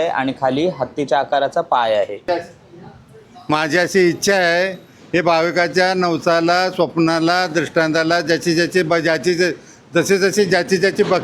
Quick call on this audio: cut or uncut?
cut